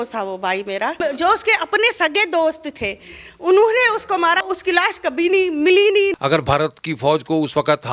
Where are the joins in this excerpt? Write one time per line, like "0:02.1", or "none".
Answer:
0:01.0
0:04.5
0:06.1